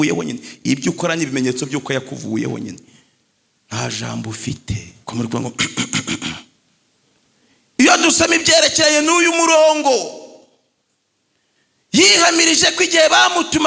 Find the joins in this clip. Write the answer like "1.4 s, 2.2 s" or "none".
none